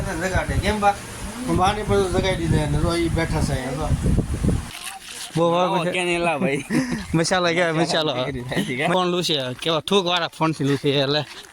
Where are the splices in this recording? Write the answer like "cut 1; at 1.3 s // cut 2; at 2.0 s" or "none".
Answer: cut 1; at 4.7 s // cut 2; at 8.9 s